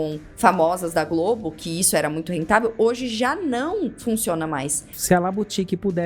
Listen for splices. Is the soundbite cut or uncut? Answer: cut